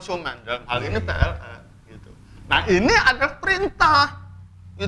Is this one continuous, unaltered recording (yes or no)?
yes